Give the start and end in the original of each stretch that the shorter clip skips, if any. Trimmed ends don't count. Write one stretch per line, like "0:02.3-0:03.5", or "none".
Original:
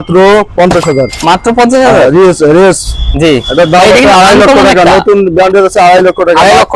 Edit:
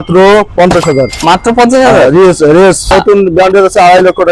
0:02.9-0:04.9